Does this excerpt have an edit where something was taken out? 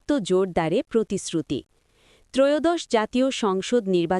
no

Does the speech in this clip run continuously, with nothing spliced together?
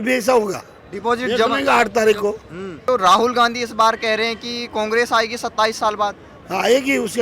no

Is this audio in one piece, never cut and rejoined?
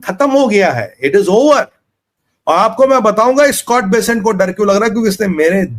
yes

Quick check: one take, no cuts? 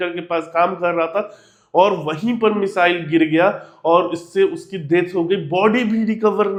yes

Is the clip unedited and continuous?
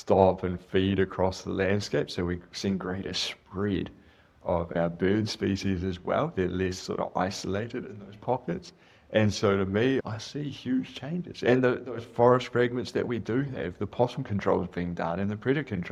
yes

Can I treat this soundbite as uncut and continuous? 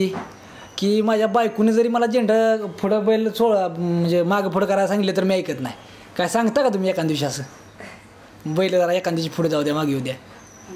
yes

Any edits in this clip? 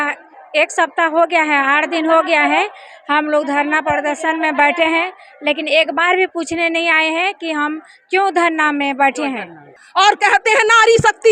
yes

